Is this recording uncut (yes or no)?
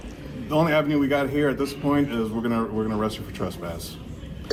yes